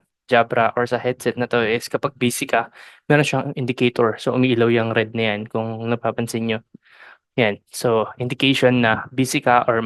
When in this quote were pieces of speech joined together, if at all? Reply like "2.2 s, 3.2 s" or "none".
none